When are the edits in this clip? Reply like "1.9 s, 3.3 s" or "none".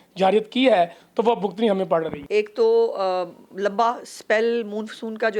2.2 s